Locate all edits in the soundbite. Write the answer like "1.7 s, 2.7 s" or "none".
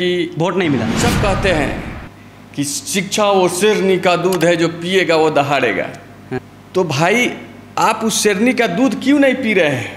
0.9 s, 6.5 s